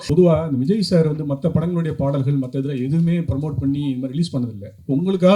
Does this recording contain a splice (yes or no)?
no